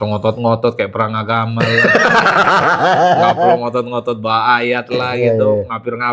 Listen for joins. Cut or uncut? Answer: uncut